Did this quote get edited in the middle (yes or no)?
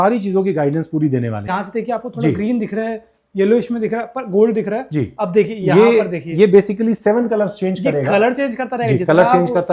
yes